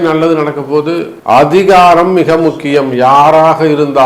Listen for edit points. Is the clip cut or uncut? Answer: cut